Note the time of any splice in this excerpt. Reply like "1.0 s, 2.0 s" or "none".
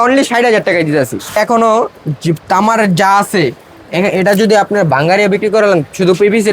1.4 s